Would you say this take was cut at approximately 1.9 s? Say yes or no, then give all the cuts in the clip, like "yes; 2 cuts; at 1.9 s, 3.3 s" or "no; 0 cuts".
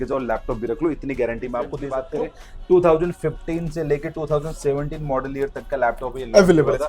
yes; 1 cut; at 1.9 s